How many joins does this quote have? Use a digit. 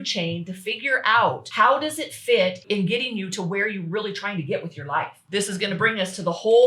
3